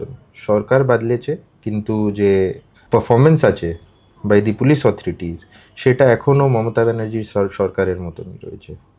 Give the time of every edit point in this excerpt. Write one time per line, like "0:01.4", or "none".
0:02.7